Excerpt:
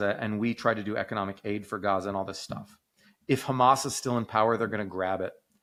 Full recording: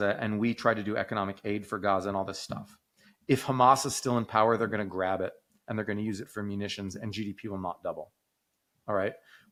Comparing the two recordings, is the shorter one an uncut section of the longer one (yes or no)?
yes